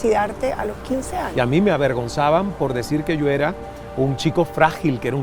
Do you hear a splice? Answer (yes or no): yes